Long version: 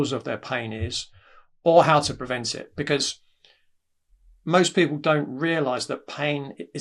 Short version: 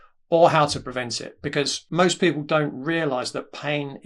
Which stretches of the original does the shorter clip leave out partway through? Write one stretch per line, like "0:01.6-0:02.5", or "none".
0:03.1-0:04.3